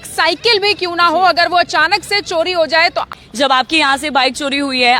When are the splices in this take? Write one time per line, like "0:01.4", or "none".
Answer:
0:03.1